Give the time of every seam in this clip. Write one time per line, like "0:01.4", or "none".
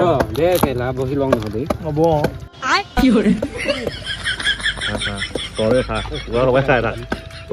none